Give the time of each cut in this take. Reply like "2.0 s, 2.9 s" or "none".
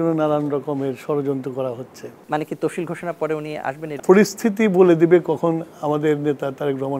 2.2 s, 3.9 s